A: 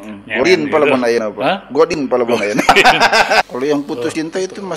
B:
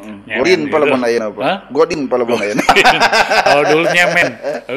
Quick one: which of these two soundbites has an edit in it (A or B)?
A